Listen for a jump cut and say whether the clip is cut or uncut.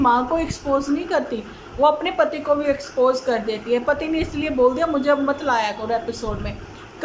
uncut